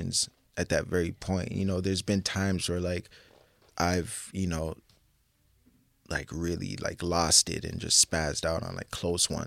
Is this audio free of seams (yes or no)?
yes